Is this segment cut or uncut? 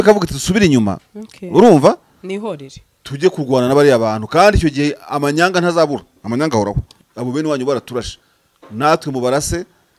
cut